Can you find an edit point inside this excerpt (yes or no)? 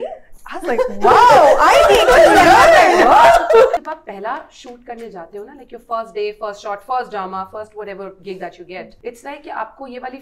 yes